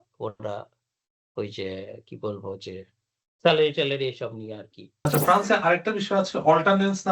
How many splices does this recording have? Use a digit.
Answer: 1